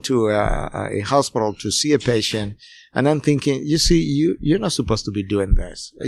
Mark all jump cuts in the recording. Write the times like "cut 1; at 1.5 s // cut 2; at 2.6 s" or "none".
none